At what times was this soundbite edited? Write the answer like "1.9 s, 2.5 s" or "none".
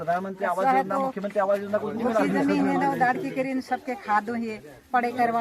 none